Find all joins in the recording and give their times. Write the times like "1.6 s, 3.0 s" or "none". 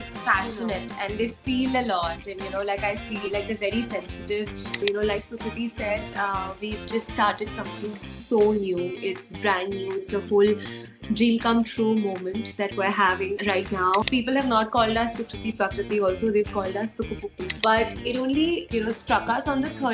4.8 s, 14.1 s, 17.5 s